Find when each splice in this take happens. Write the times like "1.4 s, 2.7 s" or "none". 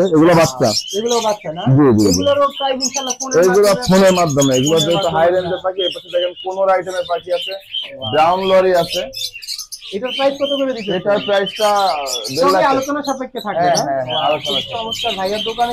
none